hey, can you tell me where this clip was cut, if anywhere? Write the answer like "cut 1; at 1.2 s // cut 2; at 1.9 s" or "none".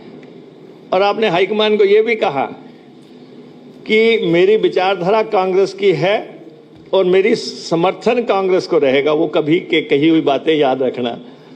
none